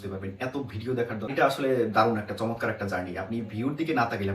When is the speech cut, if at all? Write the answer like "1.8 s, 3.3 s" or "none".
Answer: 1.3 s